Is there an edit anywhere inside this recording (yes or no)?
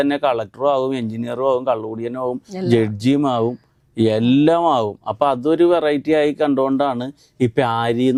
no